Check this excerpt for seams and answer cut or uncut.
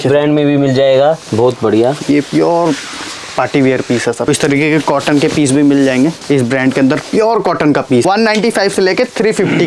cut